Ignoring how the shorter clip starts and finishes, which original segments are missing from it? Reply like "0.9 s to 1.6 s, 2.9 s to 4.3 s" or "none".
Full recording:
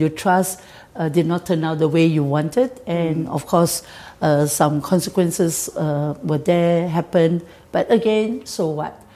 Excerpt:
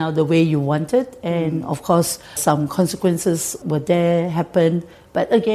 4.0 s to 4.5 s, 5.7 s to 6.2 s